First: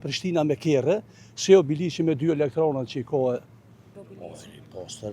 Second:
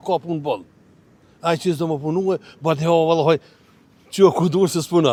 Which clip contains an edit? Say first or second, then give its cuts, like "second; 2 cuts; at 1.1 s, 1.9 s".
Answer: first; 1 cut; at 3.9 s